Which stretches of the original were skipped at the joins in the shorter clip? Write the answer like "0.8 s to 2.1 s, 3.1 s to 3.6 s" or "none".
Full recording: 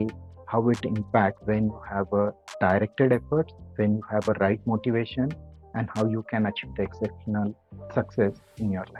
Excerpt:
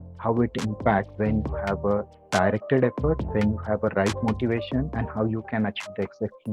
3.5 s to 3.7 s, 5.4 s to 5.8 s